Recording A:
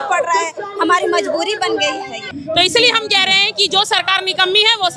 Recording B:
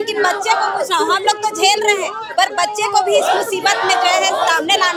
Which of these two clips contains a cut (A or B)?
A